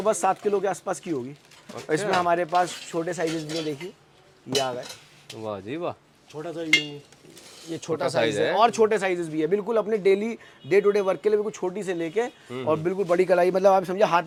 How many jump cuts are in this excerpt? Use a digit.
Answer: 0